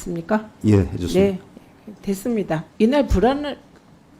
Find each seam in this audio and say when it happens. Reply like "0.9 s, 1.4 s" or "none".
2.7 s